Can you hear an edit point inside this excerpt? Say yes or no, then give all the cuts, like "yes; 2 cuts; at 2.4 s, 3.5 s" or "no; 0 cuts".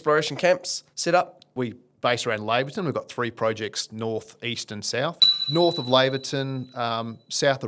yes; 2 cuts; at 1.5 s, 5.3 s